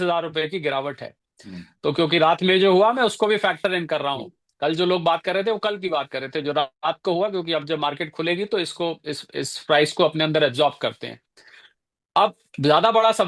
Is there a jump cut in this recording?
no; 0 cuts

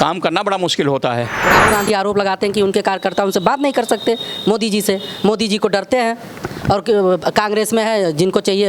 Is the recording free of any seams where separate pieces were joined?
no; 1 cut; at 1.5 s

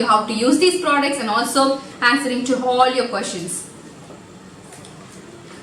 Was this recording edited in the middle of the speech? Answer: no; 0 cuts

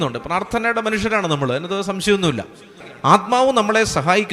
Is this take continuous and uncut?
no; 1 cut; at 2.8 s

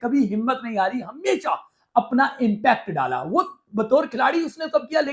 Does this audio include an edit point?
no; 0 cuts

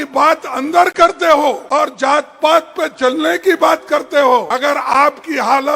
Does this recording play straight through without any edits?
no; 2 cuts; at 1.6 s, 4.5 s

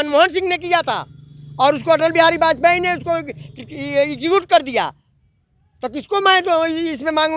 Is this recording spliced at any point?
no; 0 cuts

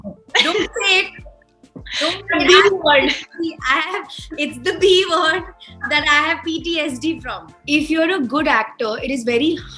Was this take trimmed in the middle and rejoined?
yes; 1 cut; at 7.5 s

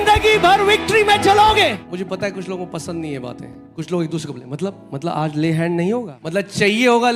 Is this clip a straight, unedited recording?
no; 3 cuts; at 1.8 s, 3.6 s, 6.2 s

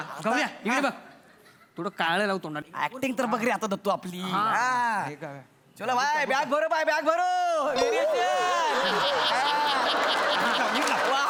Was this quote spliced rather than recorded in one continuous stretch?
no; 0 cuts

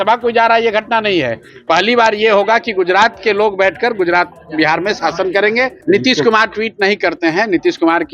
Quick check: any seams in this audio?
yes; 1 cut; at 5.8 s

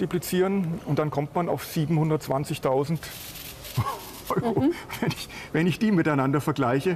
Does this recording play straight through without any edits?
yes; 0 cuts

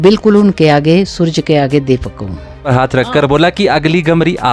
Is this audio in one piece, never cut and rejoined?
no; 1 cut; at 2.7 s

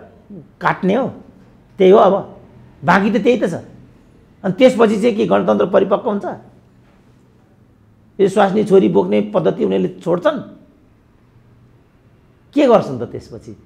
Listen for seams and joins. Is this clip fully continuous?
yes; 0 cuts

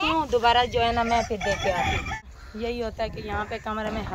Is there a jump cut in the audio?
yes; 1 cut; at 2.3 s

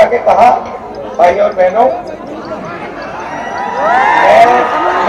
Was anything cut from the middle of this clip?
no; 0 cuts

